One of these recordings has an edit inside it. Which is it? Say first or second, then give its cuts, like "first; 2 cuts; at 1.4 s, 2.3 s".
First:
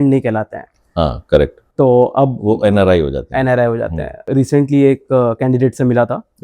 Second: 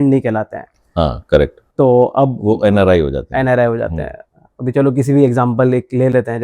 first; 1 cut; at 4.2 s